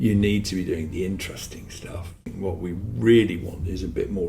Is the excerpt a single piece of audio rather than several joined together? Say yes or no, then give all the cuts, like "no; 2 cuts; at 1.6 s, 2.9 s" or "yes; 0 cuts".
no; 1 cut; at 2.2 s